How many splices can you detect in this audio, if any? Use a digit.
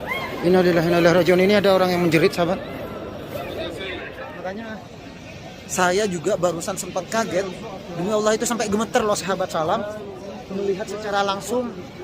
1